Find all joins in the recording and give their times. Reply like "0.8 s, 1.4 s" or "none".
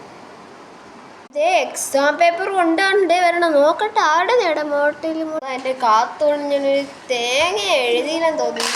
5.4 s